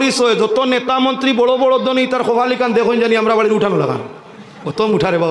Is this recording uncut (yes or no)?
yes